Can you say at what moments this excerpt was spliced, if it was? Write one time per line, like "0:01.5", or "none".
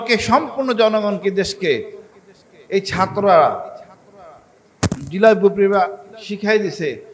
none